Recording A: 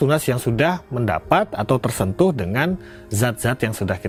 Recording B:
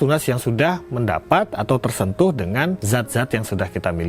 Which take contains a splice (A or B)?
B